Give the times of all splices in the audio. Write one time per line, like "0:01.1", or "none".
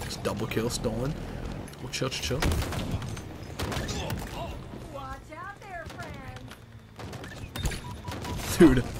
0:01.7